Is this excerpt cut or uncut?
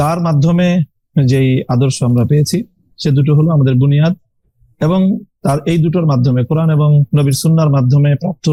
uncut